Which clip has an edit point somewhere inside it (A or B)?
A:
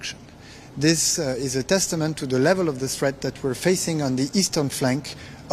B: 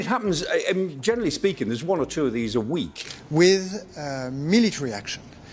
B